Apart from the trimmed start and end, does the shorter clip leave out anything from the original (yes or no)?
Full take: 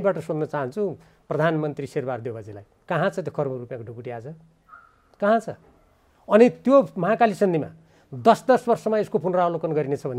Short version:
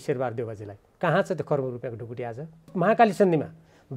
yes